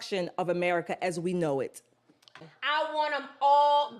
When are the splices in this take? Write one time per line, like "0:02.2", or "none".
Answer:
0:02.4